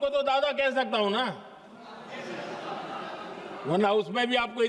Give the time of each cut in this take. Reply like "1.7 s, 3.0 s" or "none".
none

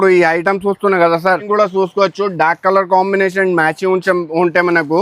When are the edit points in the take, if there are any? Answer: 1.4 s

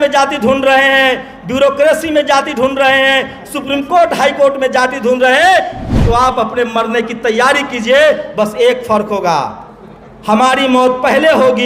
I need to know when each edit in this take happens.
5.9 s

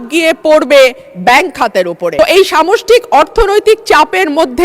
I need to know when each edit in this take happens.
2.1 s

